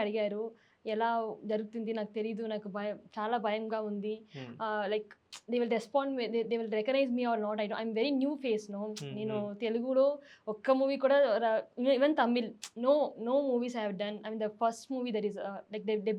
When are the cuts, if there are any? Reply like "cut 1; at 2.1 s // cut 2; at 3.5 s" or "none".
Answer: none